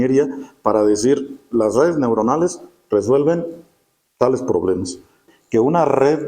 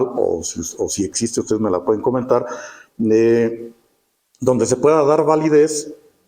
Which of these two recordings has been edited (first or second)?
first